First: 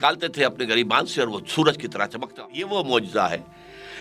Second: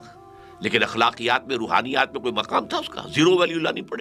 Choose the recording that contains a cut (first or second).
first